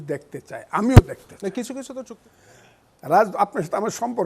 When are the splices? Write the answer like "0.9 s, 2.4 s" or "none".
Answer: 2.0 s